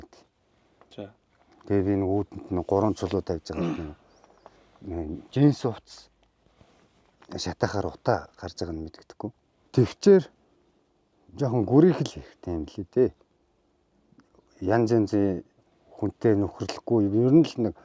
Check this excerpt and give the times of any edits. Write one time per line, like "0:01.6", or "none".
0:09.5